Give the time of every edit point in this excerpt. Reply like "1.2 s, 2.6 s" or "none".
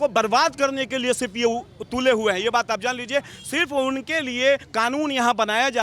none